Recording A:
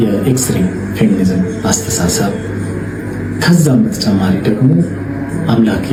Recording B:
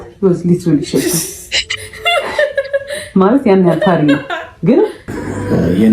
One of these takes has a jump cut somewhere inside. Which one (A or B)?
B